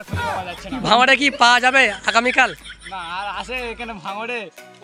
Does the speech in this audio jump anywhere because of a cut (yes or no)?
no